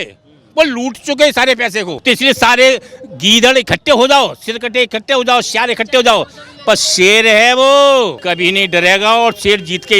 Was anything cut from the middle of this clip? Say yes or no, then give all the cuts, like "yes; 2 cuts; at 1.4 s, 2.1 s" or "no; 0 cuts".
yes; 2 cuts; at 2.0 s, 8.2 s